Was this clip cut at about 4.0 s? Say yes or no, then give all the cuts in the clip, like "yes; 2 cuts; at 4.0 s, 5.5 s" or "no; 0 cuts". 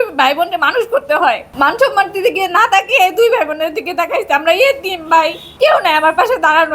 no; 2 cuts; at 1.5 s, 5.4 s